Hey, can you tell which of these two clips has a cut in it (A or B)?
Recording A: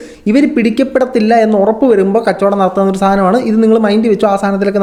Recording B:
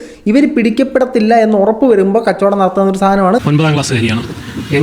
B